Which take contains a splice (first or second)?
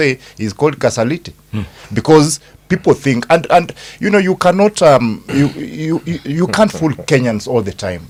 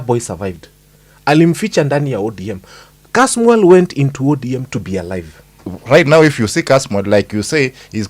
second